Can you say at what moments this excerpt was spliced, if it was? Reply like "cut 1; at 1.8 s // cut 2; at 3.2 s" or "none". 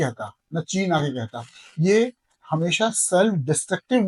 none